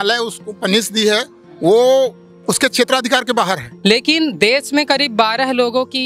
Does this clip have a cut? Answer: yes; 1 cut; at 3.7 s

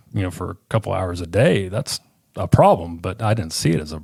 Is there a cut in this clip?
no; 0 cuts

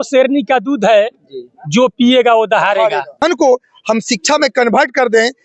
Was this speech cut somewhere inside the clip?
yes; 1 cut; at 3.2 s

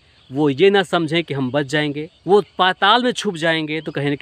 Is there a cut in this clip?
yes; 1 cut; at 2.1 s

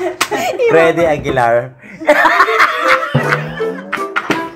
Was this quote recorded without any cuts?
yes; 0 cuts

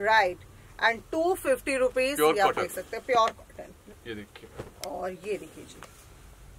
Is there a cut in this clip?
yes; 1 cut; at 3.8 s

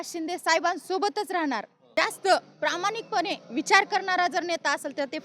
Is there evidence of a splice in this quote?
yes; 1 cut; at 1.9 s

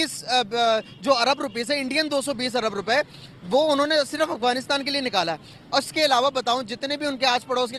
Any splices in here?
no; 0 cuts

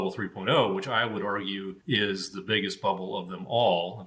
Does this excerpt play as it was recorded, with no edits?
no; 1 cut; at 1.7 s

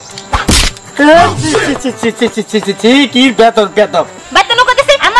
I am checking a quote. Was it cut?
yes; 1 cut; at 4.2 s

